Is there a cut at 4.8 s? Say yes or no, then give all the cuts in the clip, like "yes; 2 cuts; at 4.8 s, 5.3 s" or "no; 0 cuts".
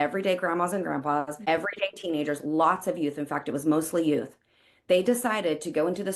no; 1 cut; at 1.3 s